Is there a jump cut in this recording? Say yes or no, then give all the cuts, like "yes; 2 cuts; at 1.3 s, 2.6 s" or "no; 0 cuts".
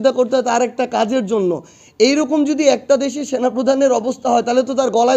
no; 0 cuts